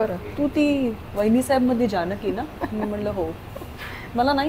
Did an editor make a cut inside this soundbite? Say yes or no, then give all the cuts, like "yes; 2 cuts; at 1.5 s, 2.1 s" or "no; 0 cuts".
no; 0 cuts